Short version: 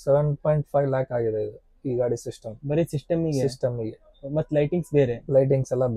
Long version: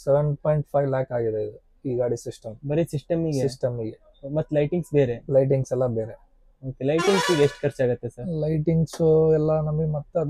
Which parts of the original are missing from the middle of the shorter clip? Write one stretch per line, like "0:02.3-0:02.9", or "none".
none